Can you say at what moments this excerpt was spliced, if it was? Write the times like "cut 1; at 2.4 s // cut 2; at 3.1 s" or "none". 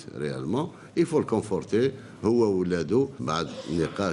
cut 1; at 1.3 s